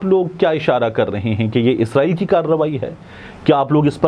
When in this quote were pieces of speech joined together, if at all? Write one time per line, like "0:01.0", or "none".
none